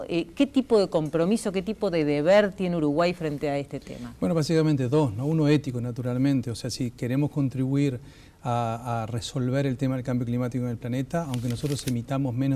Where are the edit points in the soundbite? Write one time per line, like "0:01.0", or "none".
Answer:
0:01.1